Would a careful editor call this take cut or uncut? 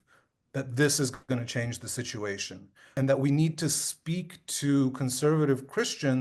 cut